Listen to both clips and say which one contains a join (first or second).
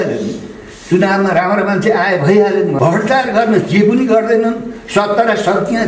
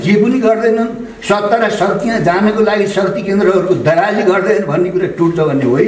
first